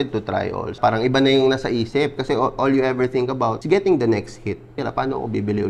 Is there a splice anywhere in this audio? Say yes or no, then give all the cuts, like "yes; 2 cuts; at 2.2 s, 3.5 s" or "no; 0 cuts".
yes; 3 cuts; at 0.8 s, 3.6 s, 4.8 s